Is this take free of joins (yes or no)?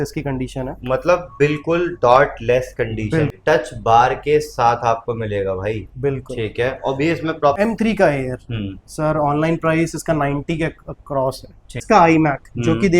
no